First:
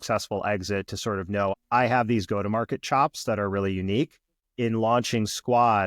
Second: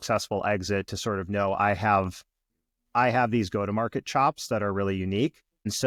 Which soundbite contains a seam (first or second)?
first